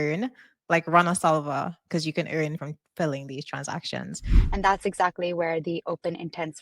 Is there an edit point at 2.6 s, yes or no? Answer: yes